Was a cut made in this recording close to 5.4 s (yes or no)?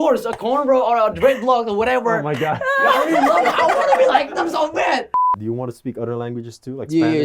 yes